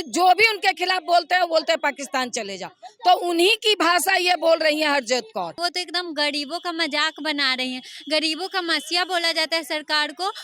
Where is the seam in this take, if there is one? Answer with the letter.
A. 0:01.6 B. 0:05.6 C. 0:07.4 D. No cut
B